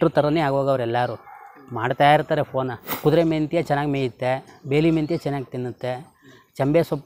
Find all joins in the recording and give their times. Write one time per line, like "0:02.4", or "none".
0:03.0